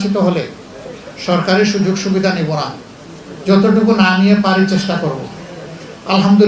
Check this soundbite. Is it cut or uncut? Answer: uncut